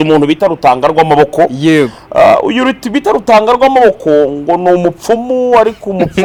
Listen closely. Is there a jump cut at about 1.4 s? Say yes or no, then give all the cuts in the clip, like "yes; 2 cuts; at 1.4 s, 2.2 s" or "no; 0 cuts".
no; 0 cuts